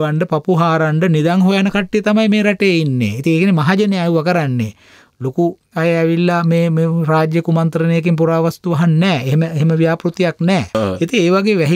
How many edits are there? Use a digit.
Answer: 1